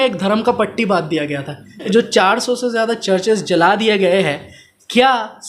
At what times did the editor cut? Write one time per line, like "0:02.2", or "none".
0:01.8